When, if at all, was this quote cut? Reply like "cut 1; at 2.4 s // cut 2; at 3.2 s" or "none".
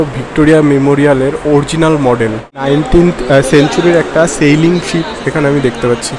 cut 1; at 2.6 s